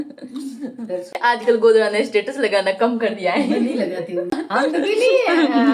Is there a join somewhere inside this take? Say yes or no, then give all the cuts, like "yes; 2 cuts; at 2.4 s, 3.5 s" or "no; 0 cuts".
yes; 2 cuts; at 1.1 s, 4.3 s